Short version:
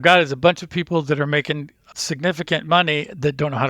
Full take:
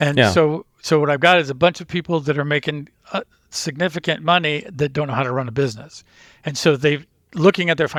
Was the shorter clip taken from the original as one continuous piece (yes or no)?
no